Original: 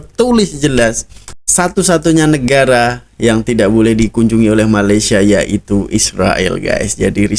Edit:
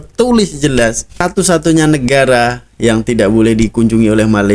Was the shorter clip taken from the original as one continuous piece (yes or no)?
no